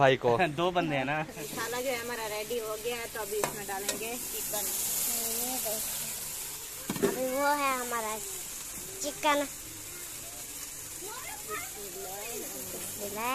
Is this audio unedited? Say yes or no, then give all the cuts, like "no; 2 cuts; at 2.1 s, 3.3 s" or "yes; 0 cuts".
no; 1 cut; at 1.4 s